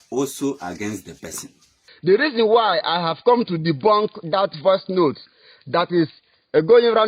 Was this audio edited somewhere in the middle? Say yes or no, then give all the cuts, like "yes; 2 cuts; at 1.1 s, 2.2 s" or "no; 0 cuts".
yes; 1 cut; at 1.9 s